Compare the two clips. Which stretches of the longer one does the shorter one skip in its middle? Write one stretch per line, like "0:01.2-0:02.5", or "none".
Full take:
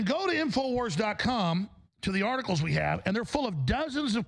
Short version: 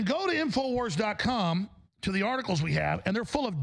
none